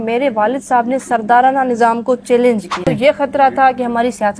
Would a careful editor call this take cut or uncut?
cut